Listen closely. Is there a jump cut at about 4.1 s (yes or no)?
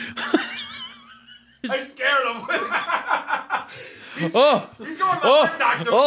no